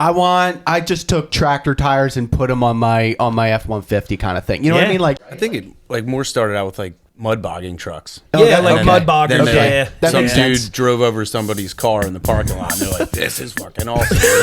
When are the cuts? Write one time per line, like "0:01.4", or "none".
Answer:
0:05.2
0:07.0